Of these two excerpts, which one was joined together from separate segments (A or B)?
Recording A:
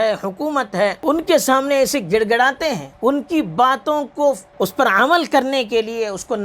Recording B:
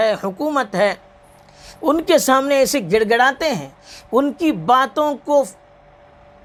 A